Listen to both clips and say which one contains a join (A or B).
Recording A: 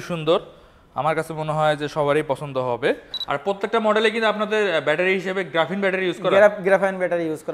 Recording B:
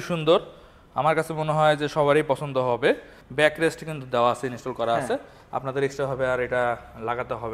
A